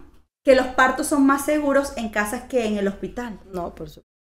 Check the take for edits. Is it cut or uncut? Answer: uncut